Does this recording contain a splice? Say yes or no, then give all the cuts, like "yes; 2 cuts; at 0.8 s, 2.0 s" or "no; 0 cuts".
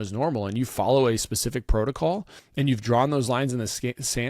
yes; 1 cut; at 2.4 s